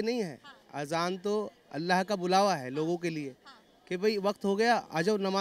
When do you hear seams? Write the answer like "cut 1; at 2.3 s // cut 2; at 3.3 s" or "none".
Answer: none